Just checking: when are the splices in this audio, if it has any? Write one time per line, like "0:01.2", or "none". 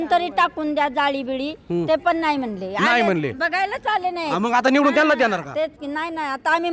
none